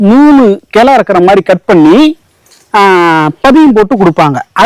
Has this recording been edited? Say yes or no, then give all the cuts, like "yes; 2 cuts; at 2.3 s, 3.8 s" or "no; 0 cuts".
no; 0 cuts